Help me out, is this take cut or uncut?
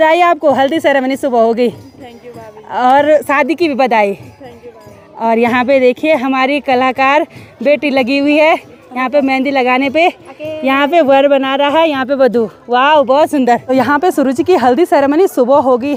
uncut